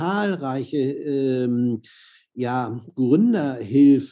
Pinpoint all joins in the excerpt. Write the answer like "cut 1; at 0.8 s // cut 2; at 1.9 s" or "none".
none

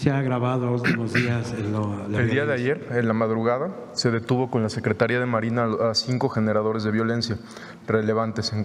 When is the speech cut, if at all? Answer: none

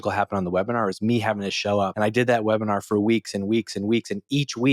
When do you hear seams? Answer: cut 1; at 1.9 s

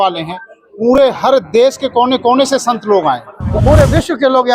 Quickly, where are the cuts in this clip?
cut 1; at 3.5 s

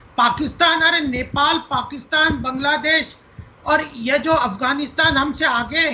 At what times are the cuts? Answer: none

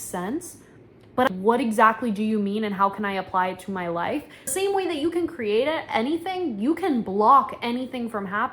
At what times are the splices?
cut 1; at 1.3 s // cut 2; at 4.5 s

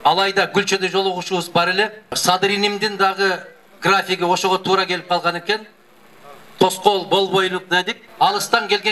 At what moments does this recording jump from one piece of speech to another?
cut 1; at 2.2 s // cut 2; at 8.0 s

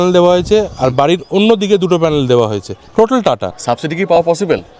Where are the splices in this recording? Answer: cut 1; at 3.2 s

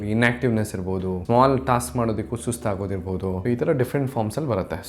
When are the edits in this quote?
cut 1; at 1.2 s // cut 2; at 3.4 s

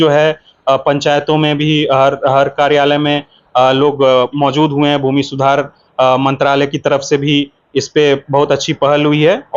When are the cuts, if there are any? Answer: none

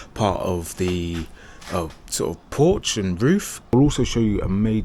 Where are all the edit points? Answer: cut 1; at 3.7 s

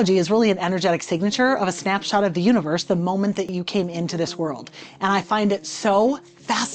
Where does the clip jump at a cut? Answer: cut 1; at 3.5 s

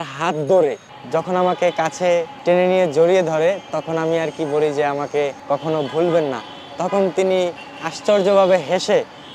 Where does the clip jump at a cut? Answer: cut 1; at 0.9 s // cut 2; at 2.3 s // cut 3; at 5.4 s

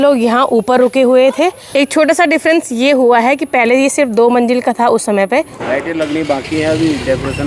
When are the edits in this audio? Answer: cut 1; at 1.7 s // cut 2; at 5.6 s

